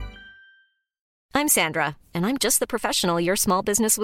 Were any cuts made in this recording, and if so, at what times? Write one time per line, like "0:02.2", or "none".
0:01.1